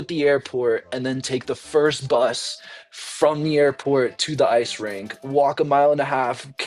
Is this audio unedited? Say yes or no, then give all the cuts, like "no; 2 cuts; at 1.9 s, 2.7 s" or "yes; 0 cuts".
yes; 0 cuts